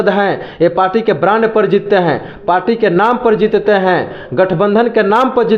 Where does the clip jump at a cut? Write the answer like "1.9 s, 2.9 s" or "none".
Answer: none

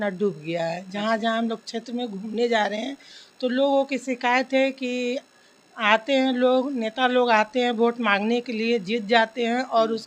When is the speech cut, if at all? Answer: none

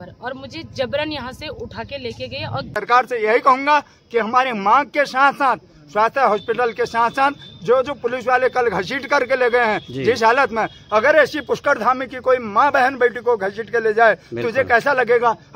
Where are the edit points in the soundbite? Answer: 2.8 s

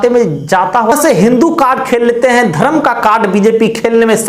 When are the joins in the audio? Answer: 0.9 s

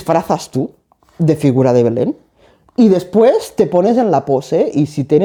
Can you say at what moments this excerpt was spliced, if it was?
none

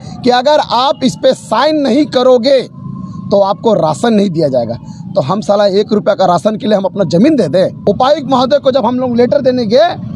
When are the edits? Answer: 7.8 s

